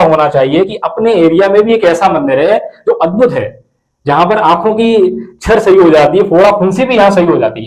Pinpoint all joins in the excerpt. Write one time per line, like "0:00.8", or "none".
0:03.4